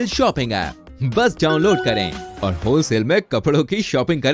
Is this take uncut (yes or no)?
yes